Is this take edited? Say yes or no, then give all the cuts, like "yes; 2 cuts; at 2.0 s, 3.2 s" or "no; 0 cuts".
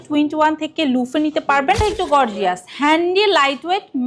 yes; 1 cut; at 1.8 s